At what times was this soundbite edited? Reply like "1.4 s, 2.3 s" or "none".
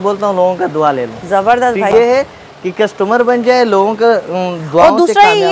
1.9 s